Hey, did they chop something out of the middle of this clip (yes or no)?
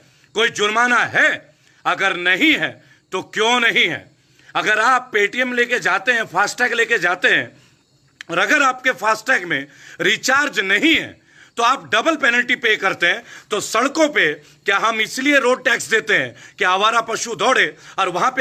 no